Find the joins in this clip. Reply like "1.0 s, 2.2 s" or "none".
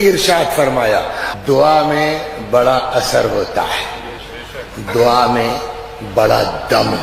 1.2 s